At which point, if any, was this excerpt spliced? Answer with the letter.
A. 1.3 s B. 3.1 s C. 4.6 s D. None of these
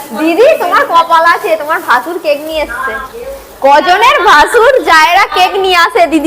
B